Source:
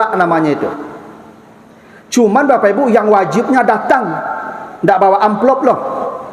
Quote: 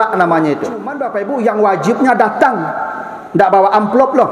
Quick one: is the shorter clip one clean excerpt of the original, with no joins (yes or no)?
no